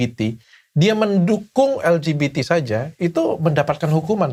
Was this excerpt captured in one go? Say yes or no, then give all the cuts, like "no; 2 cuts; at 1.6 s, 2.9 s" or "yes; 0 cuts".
yes; 0 cuts